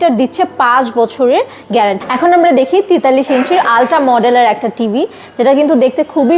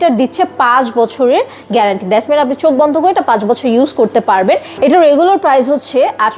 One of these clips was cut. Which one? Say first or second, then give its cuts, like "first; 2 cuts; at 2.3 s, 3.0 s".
first; 1 cut; at 2.0 s